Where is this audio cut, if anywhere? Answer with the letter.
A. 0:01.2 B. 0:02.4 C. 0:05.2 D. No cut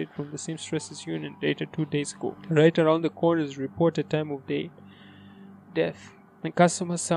B